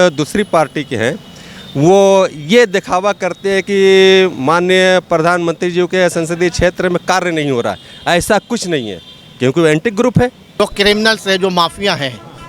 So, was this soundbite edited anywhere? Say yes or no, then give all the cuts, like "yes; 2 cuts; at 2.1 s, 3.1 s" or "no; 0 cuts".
yes; 1 cut; at 10.6 s